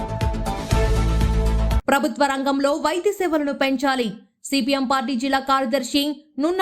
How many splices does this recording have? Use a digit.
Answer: 1